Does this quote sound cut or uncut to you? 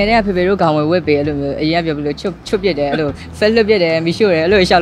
uncut